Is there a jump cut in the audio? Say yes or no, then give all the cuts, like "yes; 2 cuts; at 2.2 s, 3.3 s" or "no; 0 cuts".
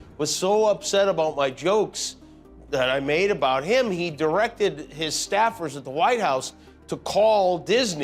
no; 0 cuts